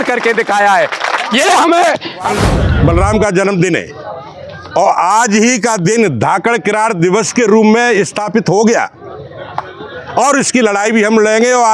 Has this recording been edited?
yes; 1 cut; at 2.3 s

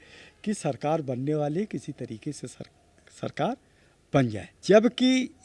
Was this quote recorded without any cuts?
no; 1 cut; at 4.5 s

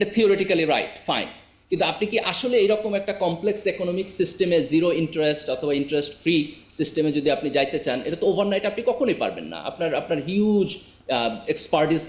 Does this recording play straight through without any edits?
yes; 0 cuts

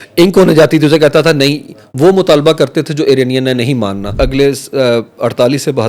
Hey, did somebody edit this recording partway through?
yes; 1 cut; at 4.1 s

